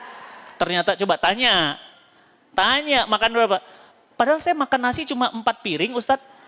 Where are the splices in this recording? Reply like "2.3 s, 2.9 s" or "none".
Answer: none